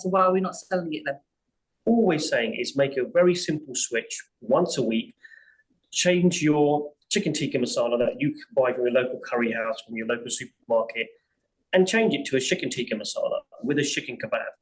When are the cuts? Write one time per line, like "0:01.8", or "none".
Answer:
0:01.2